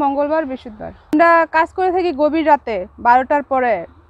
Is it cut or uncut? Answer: cut